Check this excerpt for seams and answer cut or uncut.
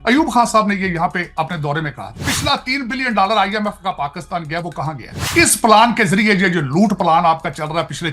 cut